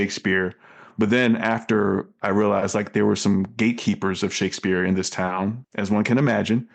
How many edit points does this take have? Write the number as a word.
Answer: one